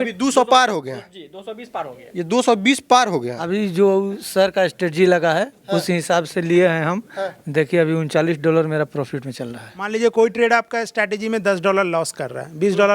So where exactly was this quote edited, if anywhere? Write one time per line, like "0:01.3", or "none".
0:03.5
0:09.9